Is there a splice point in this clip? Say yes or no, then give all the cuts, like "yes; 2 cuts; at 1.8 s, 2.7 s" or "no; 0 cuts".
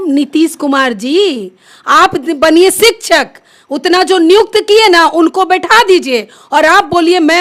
no; 0 cuts